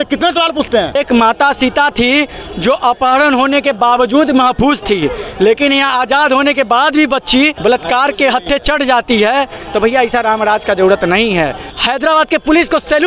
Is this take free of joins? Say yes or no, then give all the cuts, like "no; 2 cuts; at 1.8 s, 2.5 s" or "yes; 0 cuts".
no; 3 cuts; at 1.0 s, 7.6 s, 11.7 s